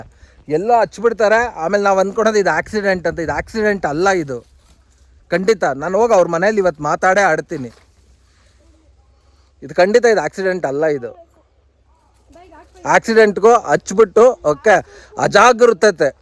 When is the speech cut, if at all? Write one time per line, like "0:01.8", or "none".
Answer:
none